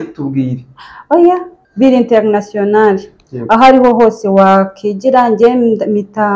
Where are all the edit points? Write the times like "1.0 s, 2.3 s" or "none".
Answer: 1.2 s